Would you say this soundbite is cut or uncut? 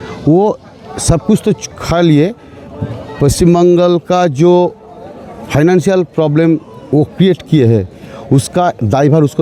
uncut